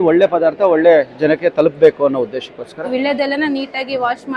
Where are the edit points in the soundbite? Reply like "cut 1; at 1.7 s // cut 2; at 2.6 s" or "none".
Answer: cut 1; at 2.9 s